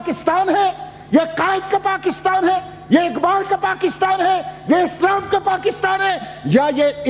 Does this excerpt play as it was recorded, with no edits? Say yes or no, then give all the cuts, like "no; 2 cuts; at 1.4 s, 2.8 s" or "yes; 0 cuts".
yes; 0 cuts